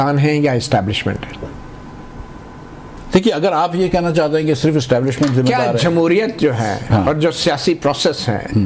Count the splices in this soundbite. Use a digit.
1